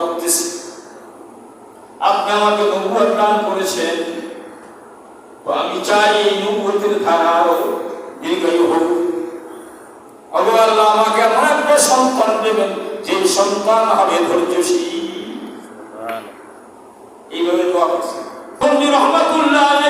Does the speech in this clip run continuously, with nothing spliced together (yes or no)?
no